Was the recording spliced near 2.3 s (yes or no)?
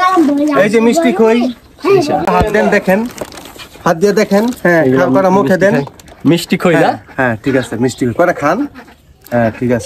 yes